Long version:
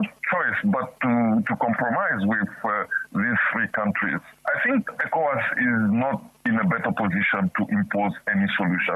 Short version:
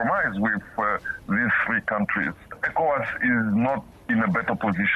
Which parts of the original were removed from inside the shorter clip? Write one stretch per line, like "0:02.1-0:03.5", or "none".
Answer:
0:04.4-0:04.9